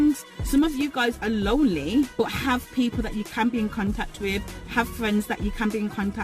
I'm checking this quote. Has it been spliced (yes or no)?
yes